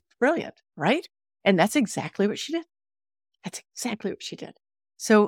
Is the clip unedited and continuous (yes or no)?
yes